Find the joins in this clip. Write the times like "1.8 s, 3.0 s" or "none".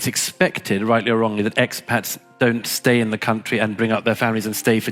none